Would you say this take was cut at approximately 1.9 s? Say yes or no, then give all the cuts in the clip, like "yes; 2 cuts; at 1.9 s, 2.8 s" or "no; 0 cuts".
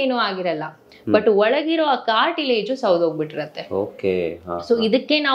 no; 0 cuts